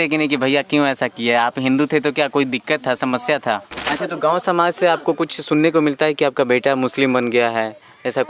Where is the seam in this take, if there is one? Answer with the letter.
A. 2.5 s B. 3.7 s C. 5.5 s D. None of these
B